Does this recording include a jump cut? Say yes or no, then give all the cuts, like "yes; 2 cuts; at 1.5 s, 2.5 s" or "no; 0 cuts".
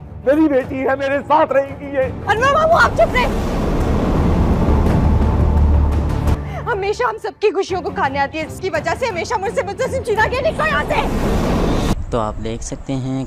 yes; 1 cut; at 12.0 s